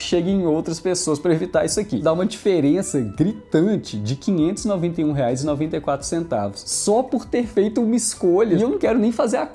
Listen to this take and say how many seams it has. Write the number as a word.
two